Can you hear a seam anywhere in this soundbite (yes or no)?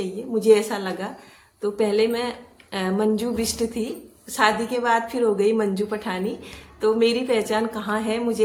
no